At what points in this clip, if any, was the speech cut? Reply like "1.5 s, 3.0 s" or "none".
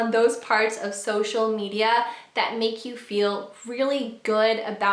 none